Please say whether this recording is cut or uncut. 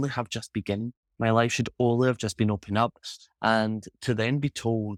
uncut